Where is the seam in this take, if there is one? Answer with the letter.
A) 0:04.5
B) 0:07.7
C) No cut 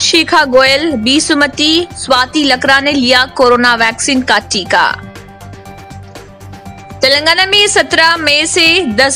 C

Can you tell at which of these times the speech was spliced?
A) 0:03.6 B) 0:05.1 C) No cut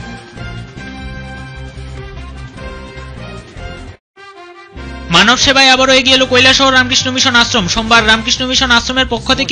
B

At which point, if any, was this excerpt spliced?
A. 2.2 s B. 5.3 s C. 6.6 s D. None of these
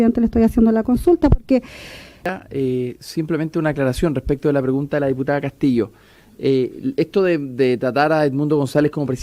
A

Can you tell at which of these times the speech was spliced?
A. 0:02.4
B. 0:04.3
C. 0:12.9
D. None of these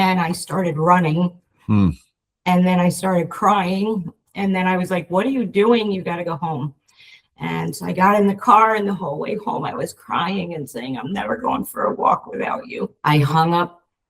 C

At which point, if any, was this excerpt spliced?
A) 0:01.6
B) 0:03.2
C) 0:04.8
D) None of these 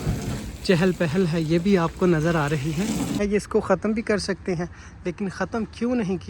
B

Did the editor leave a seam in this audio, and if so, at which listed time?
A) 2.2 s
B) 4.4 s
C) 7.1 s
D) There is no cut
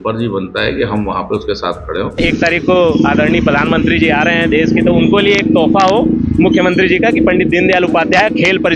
A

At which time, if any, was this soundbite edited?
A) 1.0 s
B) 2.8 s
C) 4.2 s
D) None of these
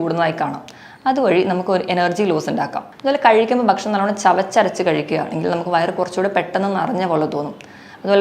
B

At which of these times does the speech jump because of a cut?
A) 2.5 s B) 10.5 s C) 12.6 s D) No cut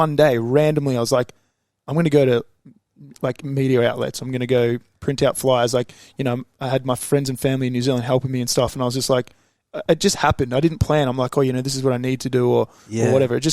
D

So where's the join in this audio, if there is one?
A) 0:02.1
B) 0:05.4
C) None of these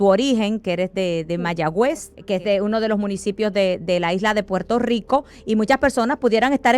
A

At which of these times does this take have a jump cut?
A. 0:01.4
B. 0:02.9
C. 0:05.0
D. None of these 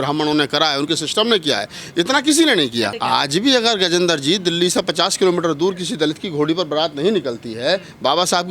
B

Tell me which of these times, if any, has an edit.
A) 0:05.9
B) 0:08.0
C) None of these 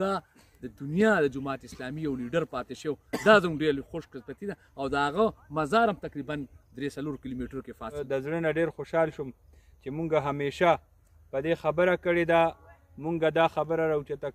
B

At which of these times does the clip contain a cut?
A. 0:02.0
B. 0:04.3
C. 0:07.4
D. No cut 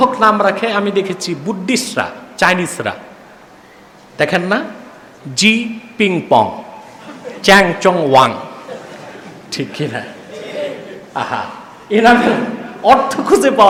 D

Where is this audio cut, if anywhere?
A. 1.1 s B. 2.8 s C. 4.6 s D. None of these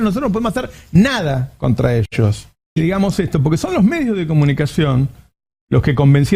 B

